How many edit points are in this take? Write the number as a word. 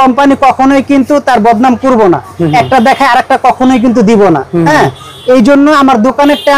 zero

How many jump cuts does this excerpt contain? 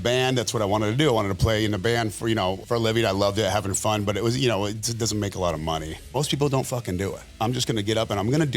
two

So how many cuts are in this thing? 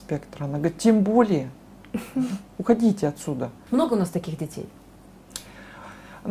one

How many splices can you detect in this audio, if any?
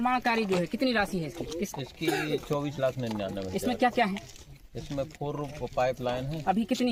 zero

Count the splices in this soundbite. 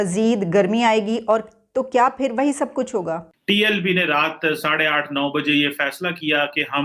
one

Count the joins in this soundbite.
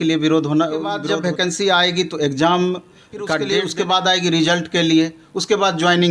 two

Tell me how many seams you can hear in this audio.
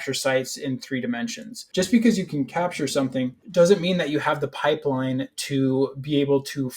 two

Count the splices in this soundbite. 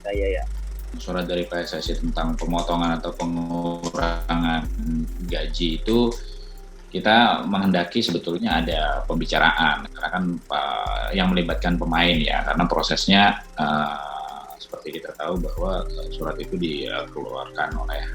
one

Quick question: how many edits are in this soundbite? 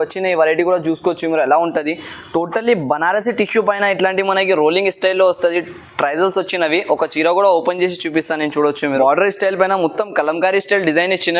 one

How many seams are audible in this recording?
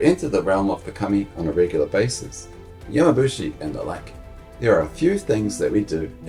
zero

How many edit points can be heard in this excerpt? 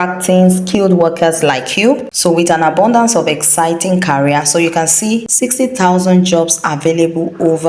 two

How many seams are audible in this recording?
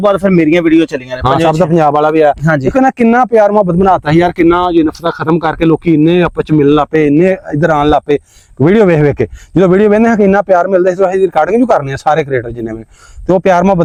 zero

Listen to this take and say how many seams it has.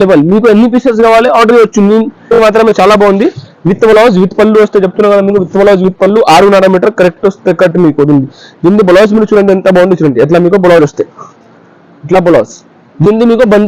one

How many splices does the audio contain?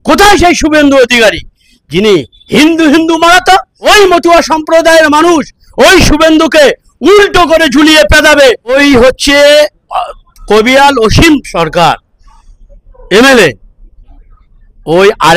two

